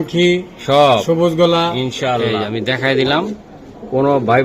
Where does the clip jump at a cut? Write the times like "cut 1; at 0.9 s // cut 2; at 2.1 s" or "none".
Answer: cut 1; at 2.4 s